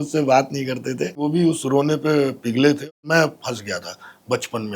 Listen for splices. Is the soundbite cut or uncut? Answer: cut